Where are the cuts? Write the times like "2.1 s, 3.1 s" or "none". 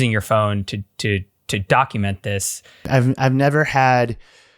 2.8 s